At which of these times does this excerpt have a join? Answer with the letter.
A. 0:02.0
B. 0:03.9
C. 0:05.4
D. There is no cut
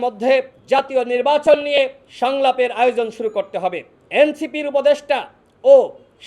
B